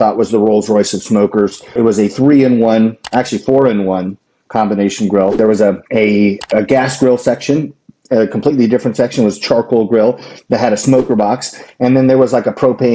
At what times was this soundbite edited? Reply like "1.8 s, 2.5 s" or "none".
1.7 s, 5.4 s